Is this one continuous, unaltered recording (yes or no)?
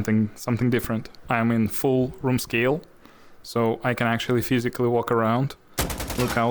no